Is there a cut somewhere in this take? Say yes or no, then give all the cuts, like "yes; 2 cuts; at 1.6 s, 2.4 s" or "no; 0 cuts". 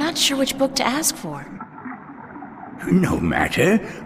yes; 2 cuts; at 1.4 s, 2.8 s